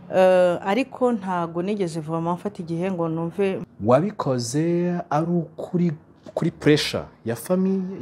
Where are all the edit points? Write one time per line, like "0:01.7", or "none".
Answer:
0:03.6